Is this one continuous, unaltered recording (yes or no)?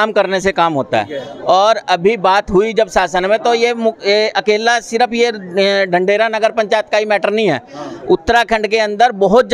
yes